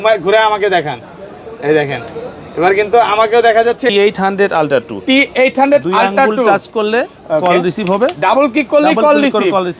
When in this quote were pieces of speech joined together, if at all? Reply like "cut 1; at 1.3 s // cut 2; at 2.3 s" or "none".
cut 1; at 3.9 s